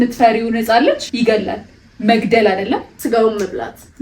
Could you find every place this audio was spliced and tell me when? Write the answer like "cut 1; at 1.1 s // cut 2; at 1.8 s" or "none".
cut 1; at 1.1 s // cut 2; at 2.9 s